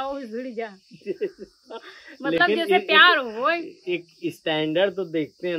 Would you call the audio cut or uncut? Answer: uncut